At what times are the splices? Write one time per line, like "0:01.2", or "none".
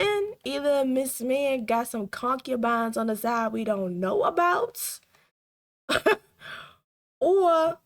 none